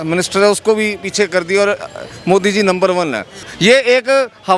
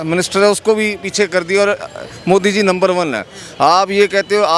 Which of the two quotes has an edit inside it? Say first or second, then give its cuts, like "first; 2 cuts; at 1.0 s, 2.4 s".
first; 1 cut; at 3.4 s